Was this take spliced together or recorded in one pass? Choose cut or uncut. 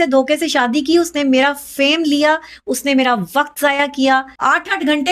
uncut